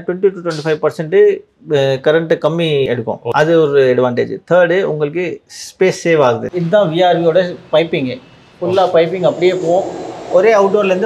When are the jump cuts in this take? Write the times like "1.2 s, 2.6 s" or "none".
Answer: 2.9 s, 6.5 s